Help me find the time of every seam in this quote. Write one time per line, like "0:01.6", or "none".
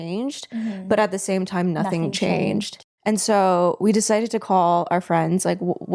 none